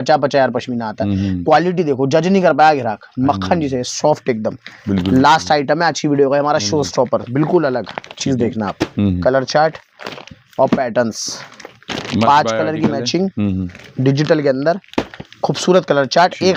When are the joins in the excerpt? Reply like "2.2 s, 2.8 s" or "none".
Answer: none